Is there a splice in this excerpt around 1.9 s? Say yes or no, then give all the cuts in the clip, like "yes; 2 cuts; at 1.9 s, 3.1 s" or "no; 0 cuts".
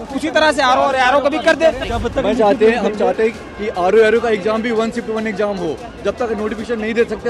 yes; 1 cut; at 1.9 s